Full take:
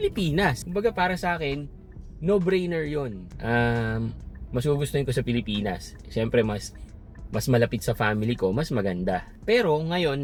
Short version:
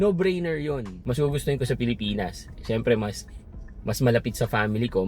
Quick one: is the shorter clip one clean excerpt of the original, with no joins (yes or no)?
no